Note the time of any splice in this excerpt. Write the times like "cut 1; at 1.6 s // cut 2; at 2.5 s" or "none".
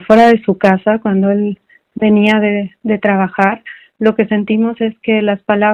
none